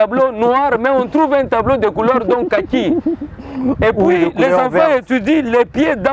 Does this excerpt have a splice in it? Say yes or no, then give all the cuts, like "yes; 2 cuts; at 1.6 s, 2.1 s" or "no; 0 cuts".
no; 0 cuts